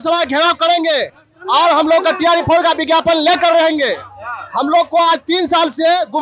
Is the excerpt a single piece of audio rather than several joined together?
yes; 0 cuts

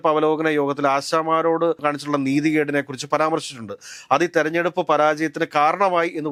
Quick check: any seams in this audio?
no; 0 cuts

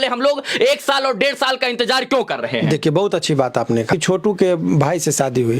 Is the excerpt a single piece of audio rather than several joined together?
no; 1 cut; at 3.9 s

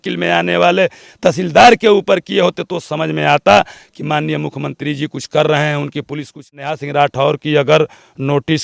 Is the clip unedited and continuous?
no; 1 cut; at 6.5 s

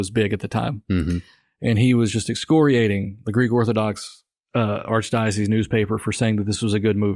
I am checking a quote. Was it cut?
no; 0 cuts

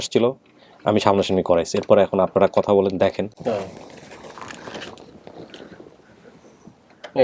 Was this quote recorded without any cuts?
no; 1 cut; at 3.3 s

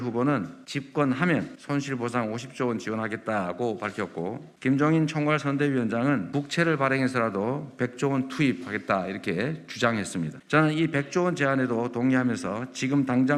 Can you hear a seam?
no; 0 cuts

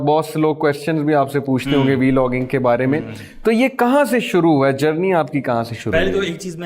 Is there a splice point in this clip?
no; 0 cuts

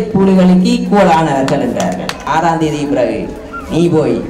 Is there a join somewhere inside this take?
yes; 1 cut; at 2.2 s

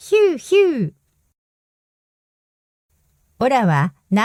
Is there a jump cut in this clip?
no; 0 cuts

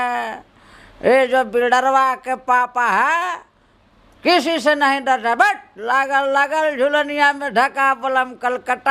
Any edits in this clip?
no; 0 cuts

